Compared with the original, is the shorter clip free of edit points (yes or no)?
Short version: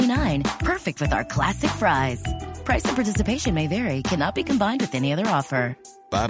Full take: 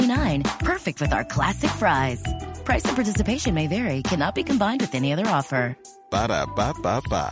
yes